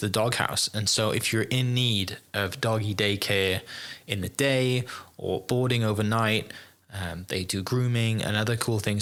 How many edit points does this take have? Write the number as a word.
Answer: zero